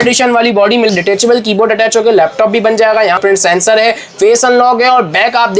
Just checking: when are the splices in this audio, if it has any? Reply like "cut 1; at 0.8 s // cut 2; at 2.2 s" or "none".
cut 1; at 0.9 s // cut 2; at 3.2 s